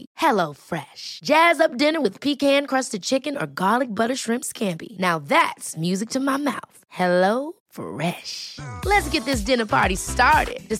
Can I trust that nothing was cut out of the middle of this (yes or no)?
yes